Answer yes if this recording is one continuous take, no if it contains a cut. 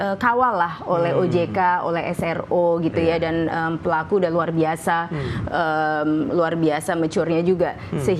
yes